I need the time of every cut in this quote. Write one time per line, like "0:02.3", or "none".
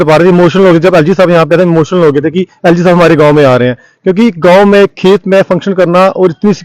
none